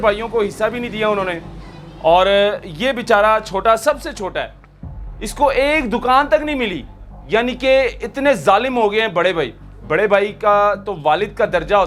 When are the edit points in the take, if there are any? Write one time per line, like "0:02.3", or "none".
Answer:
none